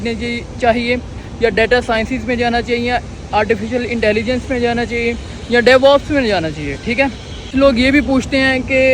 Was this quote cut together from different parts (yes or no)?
yes